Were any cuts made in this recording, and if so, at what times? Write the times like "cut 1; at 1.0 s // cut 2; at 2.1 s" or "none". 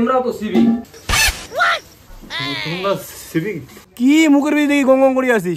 cut 1; at 3.8 s